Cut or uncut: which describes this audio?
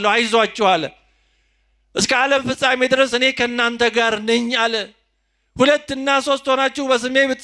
uncut